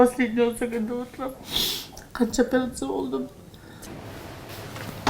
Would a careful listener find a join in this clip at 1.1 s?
no; 1 cut; at 3.9 s

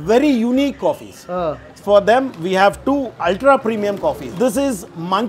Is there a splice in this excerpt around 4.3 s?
yes; 1 cut; at 4.3 s

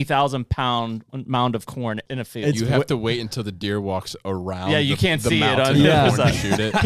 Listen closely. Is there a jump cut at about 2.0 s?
yes; 2 cuts; at 1.1 s, 2.0 s

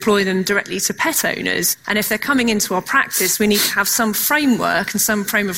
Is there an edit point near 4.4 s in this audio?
no; 1 cut; at 1.8 s

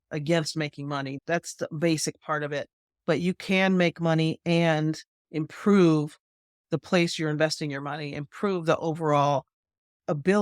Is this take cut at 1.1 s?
yes; 1 cut; at 1.1 s

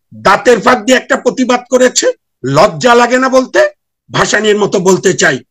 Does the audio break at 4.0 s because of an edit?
yes; 1 cut; at 4.0 s

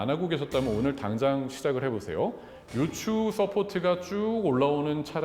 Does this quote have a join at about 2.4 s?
no; 0 cuts

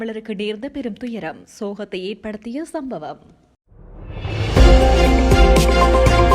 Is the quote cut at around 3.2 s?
yes; 1 cut; at 3.2 s

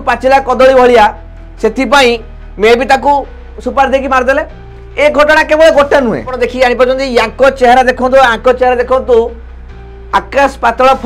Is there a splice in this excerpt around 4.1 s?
no; 1 cut; at 6.3 s

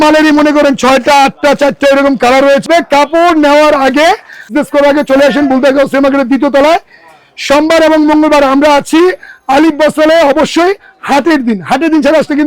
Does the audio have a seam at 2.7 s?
yes; 2 cuts; at 2.7 s, 4.5 s

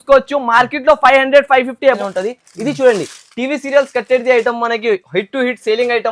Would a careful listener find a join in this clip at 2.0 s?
yes; 1 cut; at 2.0 s

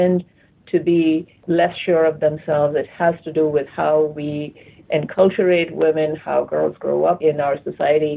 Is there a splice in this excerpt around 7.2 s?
yes; 2 cuts; at 1.4 s, 7.2 s

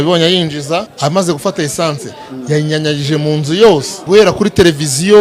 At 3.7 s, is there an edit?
yes; 2 cuts; at 0.9 s, 3.7 s

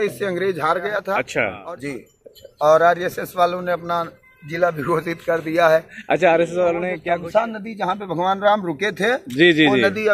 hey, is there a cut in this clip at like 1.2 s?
yes; 2 cuts; at 1.2 s, 6.9 s

